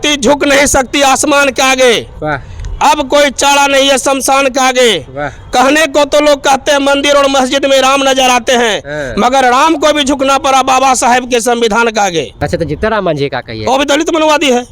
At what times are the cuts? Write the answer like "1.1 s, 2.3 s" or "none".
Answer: 12.3 s